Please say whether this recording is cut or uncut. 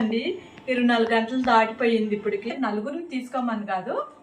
cut